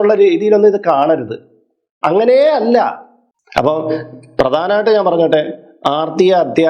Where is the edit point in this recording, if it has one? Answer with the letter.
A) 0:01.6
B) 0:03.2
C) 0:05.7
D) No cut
B